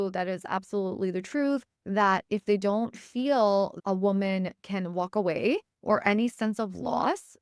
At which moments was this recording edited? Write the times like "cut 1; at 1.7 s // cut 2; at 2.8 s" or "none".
cut 1; at 1.8 s // cut 2; at 3.8 s // cut 3; at 5.7 s